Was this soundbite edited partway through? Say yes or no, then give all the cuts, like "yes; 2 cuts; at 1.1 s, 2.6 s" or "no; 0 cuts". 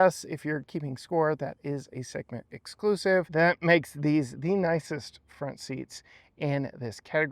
yes; 1 cut; at 3.3 s